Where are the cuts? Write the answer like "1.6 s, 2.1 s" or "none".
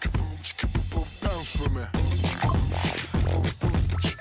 none